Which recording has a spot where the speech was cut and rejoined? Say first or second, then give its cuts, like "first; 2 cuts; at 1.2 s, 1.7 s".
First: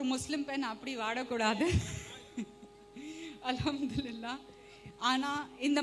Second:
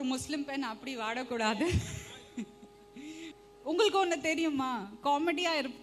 second; 1 cut; at 3.3 s